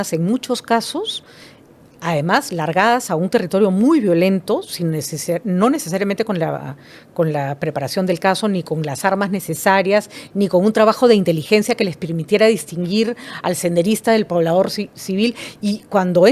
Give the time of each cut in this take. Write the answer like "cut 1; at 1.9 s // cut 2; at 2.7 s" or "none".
none